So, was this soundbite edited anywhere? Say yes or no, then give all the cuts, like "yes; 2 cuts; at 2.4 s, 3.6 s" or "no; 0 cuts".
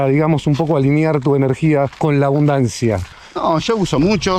no; 0 cuts